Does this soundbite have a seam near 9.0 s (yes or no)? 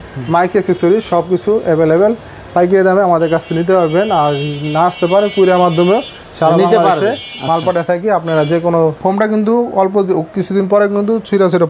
yes